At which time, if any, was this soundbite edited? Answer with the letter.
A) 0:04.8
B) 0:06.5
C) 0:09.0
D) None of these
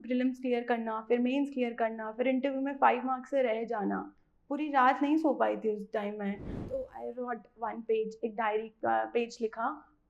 B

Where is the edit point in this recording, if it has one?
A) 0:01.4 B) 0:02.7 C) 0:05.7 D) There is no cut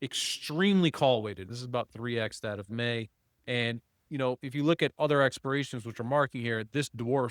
A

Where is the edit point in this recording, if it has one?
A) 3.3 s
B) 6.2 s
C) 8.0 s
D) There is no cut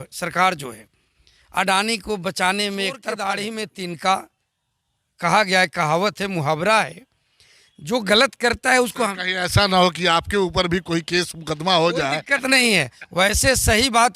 A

